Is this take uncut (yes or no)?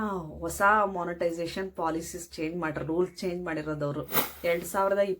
no